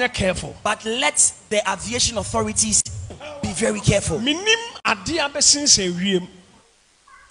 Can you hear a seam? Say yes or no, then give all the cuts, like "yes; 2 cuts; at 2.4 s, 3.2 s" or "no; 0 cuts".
no; 0 cuts